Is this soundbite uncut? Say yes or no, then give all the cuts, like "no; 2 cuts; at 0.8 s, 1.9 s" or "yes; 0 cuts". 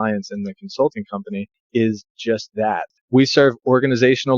no; 2 cuts; at 1.6 s, 2.9 s